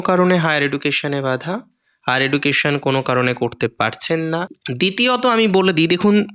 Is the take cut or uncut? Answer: cut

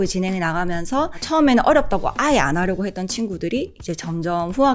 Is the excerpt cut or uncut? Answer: cut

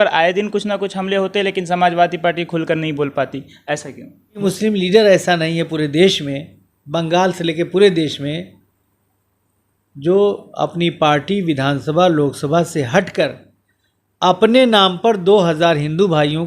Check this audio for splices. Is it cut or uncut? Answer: cut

